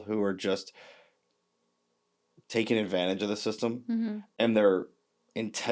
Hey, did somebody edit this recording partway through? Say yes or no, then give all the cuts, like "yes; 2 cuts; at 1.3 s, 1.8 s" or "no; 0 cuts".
no; 0 cuts